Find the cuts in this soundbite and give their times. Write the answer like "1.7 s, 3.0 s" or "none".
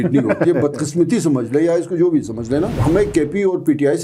2.7 s